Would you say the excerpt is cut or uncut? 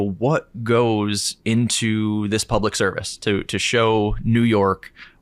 uncut